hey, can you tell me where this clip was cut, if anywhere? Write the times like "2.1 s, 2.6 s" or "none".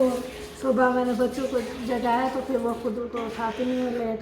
3.1 s